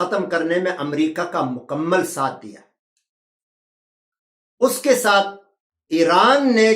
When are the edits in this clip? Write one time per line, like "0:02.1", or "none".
none